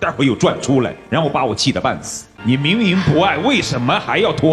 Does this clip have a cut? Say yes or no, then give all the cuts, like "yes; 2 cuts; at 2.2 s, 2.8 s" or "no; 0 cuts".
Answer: yes; 1 cut; at 2.1 s